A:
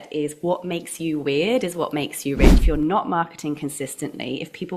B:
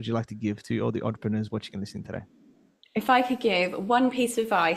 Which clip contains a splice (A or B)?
A